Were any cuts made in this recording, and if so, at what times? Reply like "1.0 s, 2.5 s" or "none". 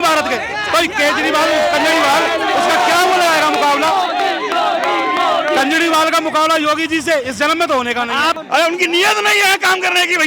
8.4 s